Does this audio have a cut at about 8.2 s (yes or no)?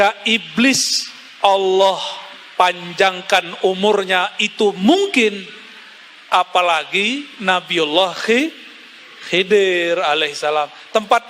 no